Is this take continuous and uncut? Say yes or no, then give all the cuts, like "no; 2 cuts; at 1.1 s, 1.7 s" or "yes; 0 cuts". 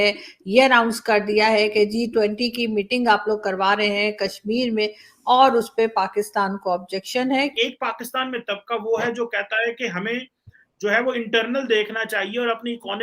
no; 1 cut; at 7.5 s